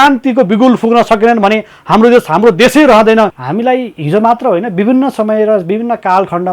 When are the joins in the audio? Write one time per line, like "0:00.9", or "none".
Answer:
0:03.4